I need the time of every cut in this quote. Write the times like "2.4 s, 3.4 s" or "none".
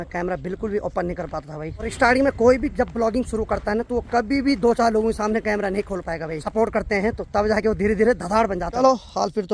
1.9 s, 6.4 s, 8.8 s